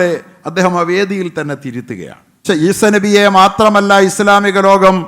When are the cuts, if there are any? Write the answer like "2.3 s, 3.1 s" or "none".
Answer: 2.4 s